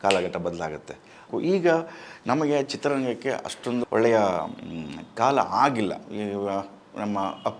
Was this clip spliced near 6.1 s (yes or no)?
no